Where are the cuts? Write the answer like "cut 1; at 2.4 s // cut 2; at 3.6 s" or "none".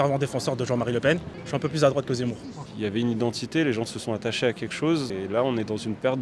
cut 1; at 1.3 s // cut 2; at 2.5 s // cut 3; at 5.1 s